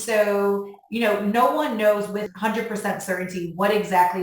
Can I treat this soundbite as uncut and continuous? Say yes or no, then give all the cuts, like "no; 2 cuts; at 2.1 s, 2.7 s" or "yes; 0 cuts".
no; 1 cut; at 2.3 s